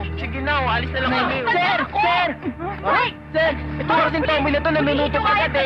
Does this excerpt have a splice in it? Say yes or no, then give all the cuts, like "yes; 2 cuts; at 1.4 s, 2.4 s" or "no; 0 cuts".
yes; 1 cut; at 1.4 s